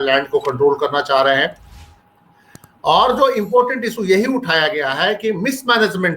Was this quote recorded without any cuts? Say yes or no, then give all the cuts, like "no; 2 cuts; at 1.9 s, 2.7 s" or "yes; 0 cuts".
yes; 0 cuts